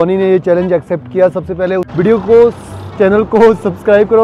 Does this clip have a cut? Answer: yes; 1 cut; at 1.9 s

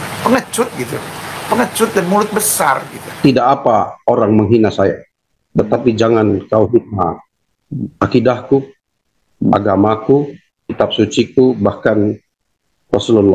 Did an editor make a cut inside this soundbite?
yes; 1 cut; at 3.1 s

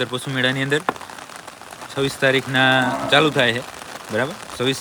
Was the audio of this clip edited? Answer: no; 0 cuts

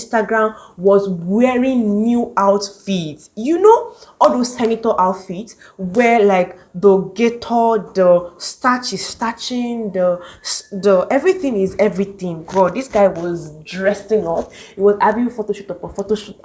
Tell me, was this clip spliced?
no; 0 cuts

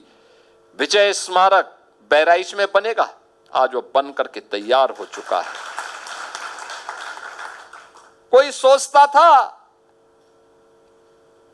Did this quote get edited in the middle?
no; 0 cuts

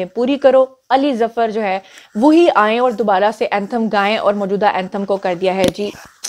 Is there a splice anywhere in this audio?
no; 0 cuts

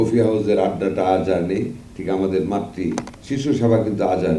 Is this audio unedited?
no; 1 cut; at 3.1 s

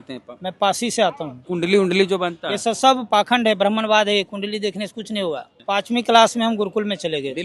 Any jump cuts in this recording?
yes; 2 cuts; at 1.4 s, 5.5 s

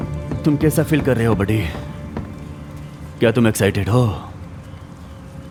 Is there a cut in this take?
no; 0 cuts

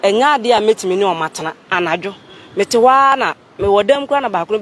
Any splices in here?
yes; 1 cut; at 1.7 s

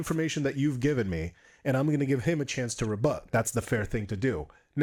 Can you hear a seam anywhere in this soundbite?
no; 0 cuts

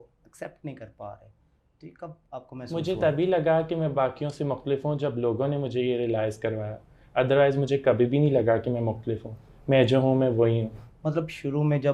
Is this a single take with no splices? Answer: yes; 0 cuts

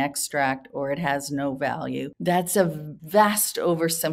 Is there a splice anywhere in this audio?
yes; 2 cuts; at 2.1 s, 2.9 s

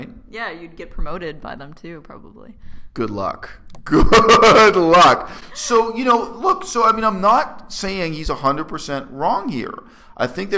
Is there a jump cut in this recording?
no; 0 cuts

